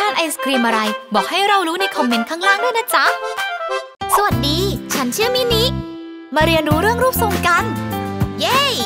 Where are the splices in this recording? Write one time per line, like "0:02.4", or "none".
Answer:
0:03.9